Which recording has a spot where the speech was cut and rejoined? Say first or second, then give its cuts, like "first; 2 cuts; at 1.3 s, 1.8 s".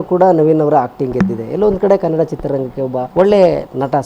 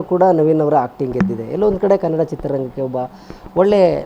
first; 1 cut; at 3.0 s